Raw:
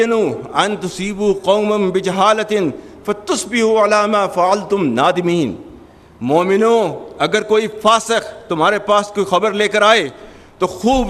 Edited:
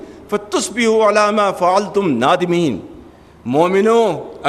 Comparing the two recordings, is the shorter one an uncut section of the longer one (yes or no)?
yes